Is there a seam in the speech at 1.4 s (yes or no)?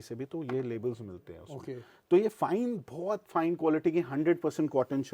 no